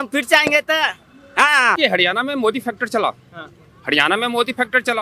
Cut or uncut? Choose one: cut